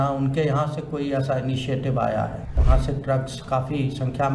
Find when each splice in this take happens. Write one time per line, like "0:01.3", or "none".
0:02.6